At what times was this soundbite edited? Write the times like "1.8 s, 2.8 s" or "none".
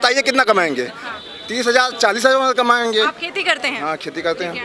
none